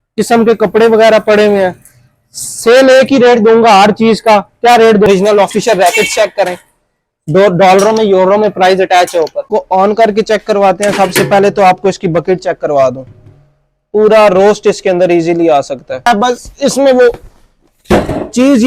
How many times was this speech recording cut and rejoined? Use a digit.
3